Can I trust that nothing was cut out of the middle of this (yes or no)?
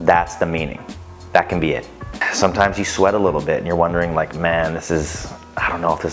no